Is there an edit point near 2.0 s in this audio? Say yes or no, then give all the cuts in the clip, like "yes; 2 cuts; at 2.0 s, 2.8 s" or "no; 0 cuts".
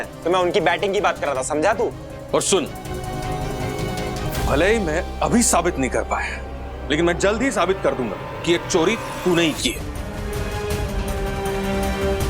yes; 1 cut; at 2.0 s